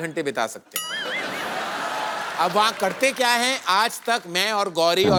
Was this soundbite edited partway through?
no; 0 cuts

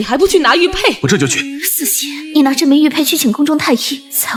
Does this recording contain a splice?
no; 0 cuts

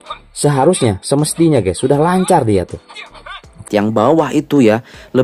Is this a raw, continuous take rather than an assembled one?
no; 1 cut; at 3.7 s

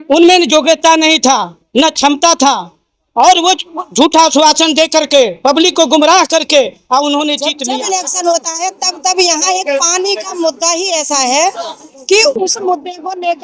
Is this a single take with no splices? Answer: no; 1 cut; at 7.6 s

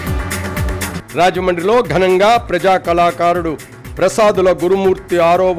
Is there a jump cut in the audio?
yes; 1 cut; at 0.9 s

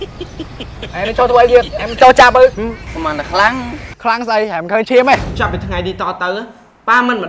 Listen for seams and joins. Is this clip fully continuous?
no; 1 cut; at 5.3 s

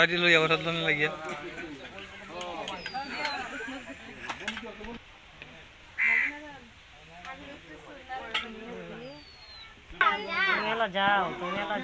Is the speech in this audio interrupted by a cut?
no; 0 cuts

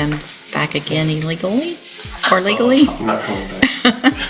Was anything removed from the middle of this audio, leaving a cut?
no; 0 cuts

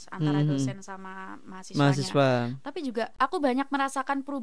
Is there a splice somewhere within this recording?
yes; 1 cut; at 3.2 s

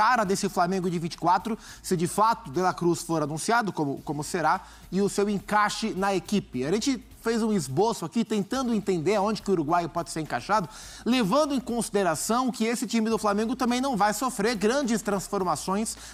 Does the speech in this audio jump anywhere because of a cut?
no; 0 cuts

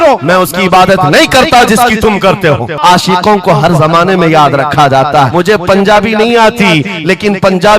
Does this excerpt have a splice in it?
yes; 2 cuts; at 2.8 s, 5.3 s

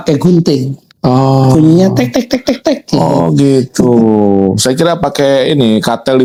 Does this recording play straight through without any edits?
yes; 0 cuts

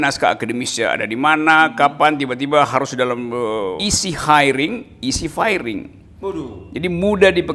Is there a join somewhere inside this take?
yes; 1 cut; at 3.8 s

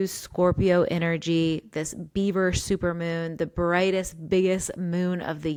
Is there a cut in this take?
no; 0 cuts

